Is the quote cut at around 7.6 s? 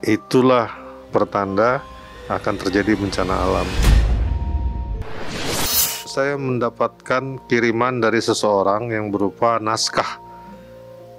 no; 2 cuts; at 3.8 s, 6.1 s

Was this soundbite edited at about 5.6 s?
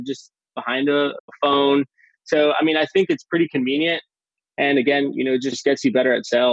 yes; 2 cuts; at 1.3 s, 5.6 s

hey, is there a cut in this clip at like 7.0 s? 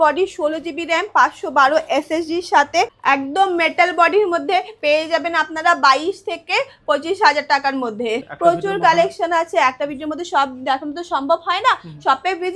no; 2 cuts; at 2.9 s, 8.3 s

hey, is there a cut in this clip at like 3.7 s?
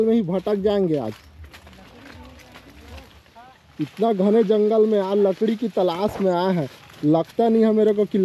yes; 1 cut; at 3.7 s

